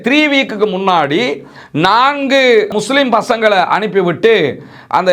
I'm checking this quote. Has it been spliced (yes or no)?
yes